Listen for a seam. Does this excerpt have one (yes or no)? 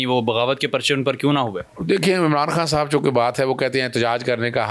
no